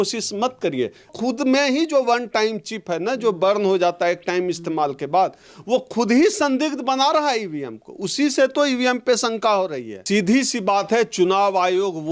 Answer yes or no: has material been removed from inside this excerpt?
yes